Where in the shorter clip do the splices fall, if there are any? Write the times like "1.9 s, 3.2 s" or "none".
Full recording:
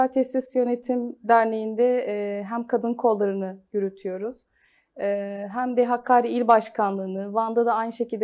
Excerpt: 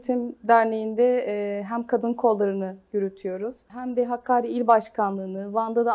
3.7 s